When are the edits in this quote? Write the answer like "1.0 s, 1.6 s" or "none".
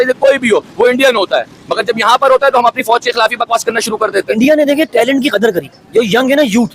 4.3 s